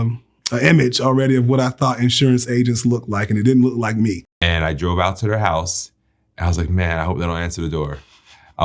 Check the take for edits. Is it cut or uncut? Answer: cut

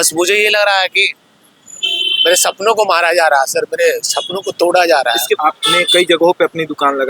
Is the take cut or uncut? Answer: cut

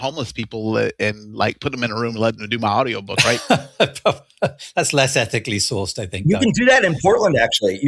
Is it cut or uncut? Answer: uncut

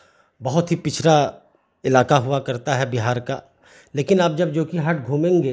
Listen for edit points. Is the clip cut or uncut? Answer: uncut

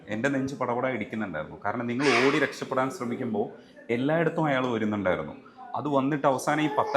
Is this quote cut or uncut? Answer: uncut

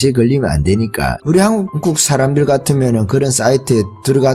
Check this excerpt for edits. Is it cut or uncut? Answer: cut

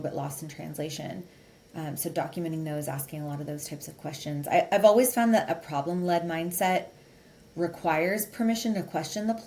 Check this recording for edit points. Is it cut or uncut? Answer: uncut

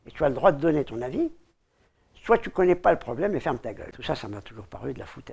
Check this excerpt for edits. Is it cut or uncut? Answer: cut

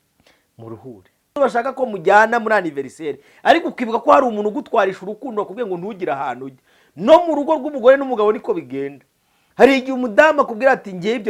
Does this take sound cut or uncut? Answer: cut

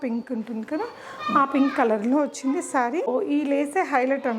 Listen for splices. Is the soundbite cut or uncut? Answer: cut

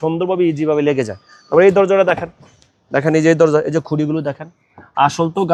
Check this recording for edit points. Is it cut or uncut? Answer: uncut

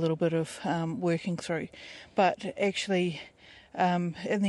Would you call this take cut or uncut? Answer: uncut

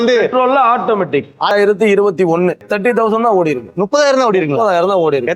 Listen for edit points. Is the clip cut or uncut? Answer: cut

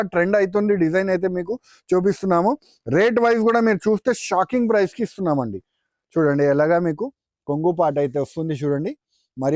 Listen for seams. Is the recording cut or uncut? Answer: uncut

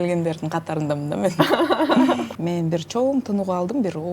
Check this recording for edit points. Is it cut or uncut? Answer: cut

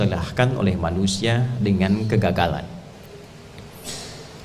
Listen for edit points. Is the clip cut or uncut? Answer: cut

